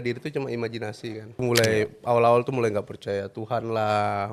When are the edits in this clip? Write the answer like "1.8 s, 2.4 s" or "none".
1.4 s